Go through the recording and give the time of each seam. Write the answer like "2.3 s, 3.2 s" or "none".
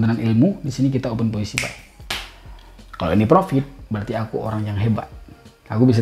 none